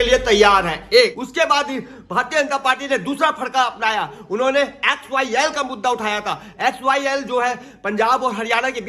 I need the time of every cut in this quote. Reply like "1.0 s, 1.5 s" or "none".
1.2 s